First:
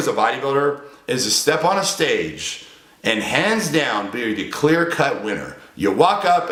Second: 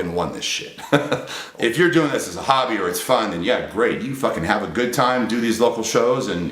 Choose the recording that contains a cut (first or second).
second